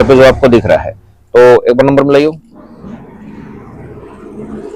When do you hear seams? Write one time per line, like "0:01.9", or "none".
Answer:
0:02.5

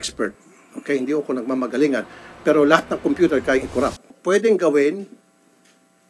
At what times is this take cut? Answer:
0:04.1

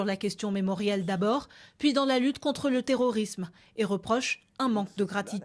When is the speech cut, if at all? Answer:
none

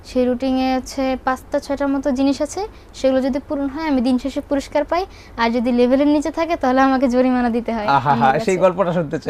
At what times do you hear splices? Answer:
none

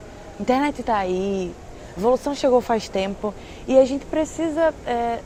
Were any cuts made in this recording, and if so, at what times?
none

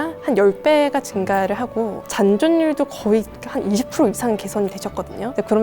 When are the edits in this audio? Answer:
0:02.0

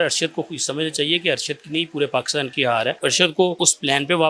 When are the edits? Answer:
0:03.0
0:03.6

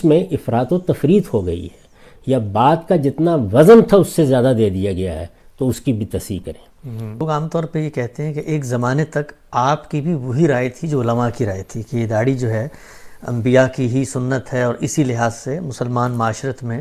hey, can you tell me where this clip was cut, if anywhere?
0:07.2

